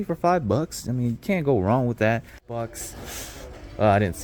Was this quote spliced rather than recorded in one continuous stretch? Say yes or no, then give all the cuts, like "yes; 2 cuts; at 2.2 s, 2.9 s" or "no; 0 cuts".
yes; 1 cut; at 2.7 s